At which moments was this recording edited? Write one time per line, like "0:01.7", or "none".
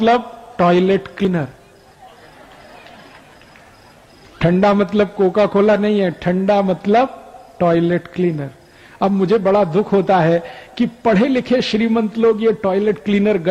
0:01.3